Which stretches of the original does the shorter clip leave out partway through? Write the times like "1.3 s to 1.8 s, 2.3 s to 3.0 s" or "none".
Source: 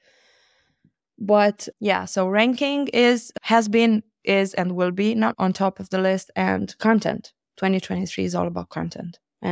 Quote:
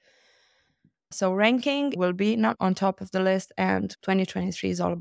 1.1 s to 2.1 s, 2.9 s to 4.7 s, 6.7 s to 7.5 s